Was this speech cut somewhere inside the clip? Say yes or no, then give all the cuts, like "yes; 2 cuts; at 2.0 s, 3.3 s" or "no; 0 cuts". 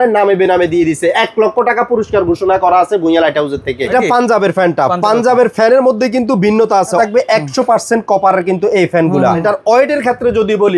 yes; 3 cuts; at 3.9 s, 7.0 s, 9.4 s